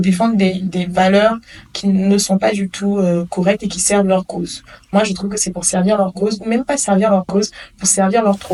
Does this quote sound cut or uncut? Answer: uncut